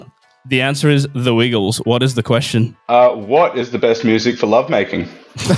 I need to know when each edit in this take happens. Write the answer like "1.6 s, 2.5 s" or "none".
none